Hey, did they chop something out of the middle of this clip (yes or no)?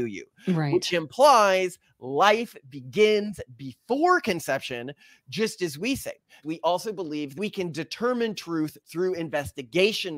yes